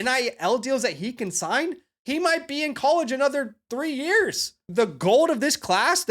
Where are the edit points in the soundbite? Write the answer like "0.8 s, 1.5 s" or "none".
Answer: 1.9 s, 4.7 s